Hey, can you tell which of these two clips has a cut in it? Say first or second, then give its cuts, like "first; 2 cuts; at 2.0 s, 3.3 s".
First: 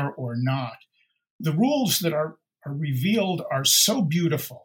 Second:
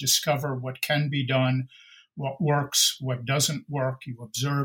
first; 1 cut; at 1.4 s